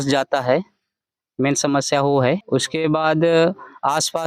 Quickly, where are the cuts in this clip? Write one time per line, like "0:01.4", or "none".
0:02.4